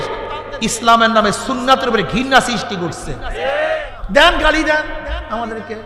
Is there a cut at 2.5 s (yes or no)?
no